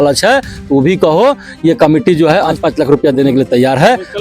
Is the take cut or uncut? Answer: cut